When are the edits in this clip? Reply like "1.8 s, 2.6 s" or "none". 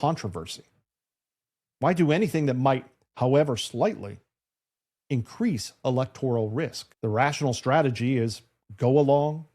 6.8 s